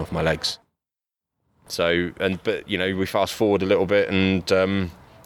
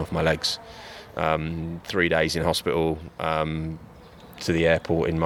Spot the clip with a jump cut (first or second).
first